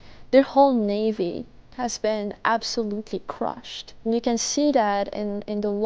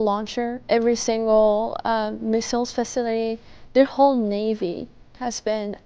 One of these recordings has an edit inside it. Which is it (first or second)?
first